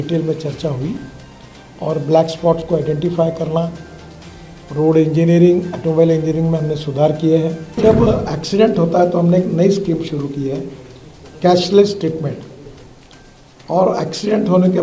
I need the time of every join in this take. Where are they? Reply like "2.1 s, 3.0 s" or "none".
7.8 s